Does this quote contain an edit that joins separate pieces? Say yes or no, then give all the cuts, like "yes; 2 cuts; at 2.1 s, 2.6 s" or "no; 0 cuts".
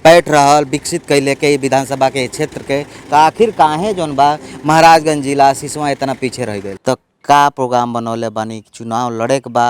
yes; 1 cut; at 6.7 s